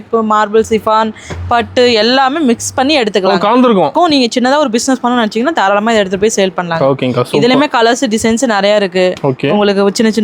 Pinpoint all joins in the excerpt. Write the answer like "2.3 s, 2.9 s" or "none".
3.9 s